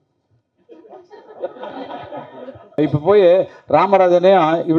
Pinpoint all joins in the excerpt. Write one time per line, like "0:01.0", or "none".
0:02.8